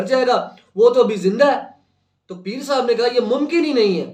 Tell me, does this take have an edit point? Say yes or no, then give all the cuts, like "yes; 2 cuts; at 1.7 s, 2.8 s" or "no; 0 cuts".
no; 0 cuts